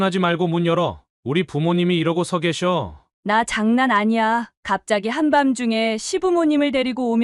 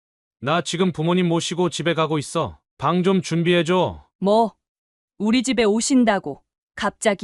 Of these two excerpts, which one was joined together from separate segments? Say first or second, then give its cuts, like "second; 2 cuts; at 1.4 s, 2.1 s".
second; 1 cut; at 4.0 s